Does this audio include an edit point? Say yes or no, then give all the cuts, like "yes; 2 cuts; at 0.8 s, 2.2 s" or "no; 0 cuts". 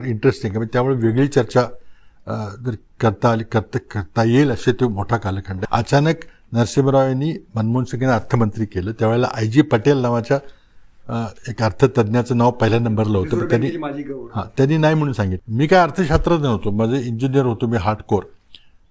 yes; 2 cuts; at 5.5 s, 15.4 s